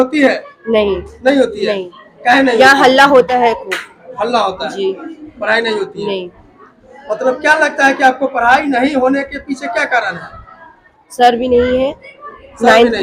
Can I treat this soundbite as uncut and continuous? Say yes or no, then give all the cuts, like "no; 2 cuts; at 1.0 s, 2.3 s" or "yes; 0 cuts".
yes; 0 cuts